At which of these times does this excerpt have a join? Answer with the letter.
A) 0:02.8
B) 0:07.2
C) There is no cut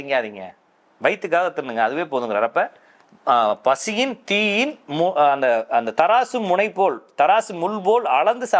C